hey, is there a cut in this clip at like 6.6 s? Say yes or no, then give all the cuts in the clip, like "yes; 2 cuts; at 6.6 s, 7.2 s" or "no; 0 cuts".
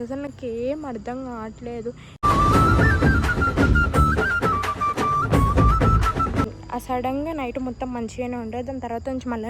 yes; 1 cut; at 6.6 s